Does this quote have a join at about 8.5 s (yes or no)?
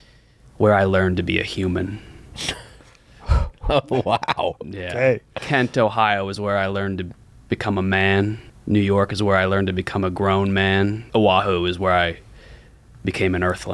yes